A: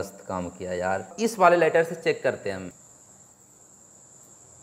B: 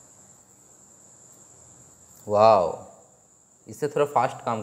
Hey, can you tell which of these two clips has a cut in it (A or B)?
A